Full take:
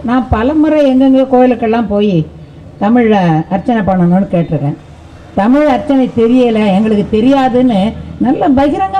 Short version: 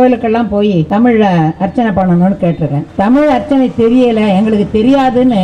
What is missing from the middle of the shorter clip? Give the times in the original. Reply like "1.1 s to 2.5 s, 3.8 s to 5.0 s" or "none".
2.2 s to 2.8 s, 4.7 s to 5.2 s